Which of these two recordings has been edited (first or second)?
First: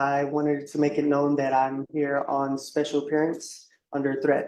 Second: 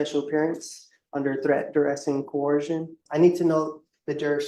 second